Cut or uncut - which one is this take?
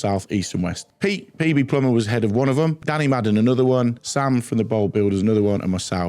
cut